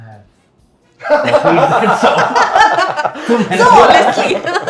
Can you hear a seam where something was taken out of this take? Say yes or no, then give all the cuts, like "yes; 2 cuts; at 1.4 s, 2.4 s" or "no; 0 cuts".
no; 0 cuts